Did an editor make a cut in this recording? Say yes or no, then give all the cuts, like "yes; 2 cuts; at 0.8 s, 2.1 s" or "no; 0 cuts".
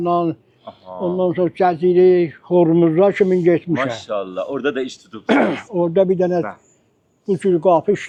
no; 0 cuts